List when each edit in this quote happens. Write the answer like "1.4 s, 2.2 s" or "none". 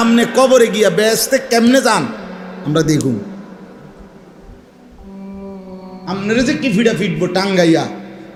none

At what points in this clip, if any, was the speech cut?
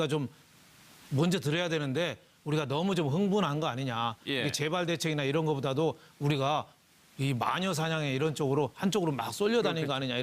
2.7 s

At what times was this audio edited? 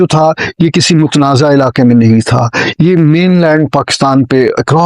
2.6 s

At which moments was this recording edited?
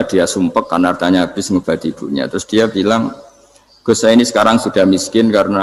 none

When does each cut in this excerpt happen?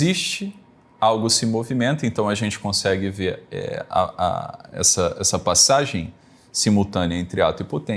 none

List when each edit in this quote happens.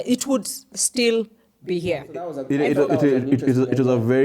2.4 s

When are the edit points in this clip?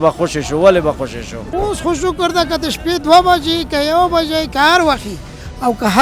1.6 s

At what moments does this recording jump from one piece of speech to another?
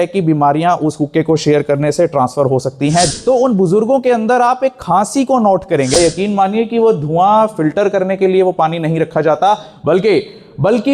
3.1 s, 5.9 s

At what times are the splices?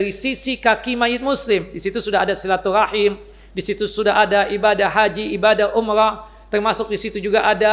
none

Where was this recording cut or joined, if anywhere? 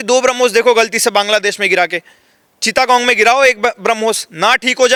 none

